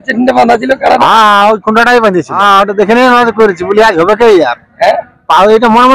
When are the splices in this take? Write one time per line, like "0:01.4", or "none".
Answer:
0:02.4